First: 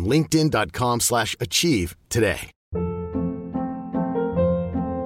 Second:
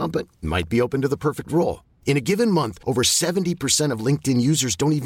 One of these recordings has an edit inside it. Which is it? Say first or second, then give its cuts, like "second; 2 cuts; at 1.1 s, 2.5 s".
first; 1 cut; at 2.5 s